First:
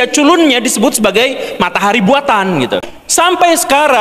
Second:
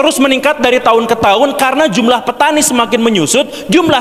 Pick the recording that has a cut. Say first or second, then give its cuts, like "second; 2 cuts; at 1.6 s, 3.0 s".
first; 1 cut; at 3.0 s